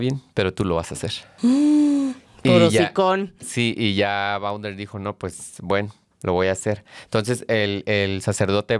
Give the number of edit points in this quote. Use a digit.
0